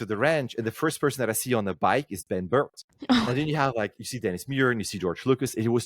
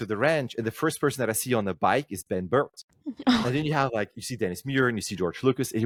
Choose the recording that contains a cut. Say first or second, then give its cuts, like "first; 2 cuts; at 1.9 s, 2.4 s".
first; 1 cut; at 2.8 s